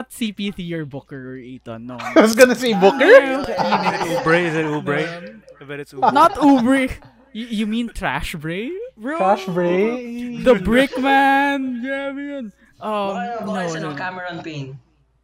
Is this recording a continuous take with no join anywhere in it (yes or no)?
yes